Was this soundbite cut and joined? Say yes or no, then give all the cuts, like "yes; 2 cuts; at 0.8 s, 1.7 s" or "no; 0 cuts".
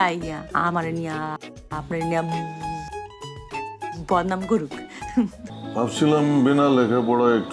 yes; 1 cut; at 5.5 s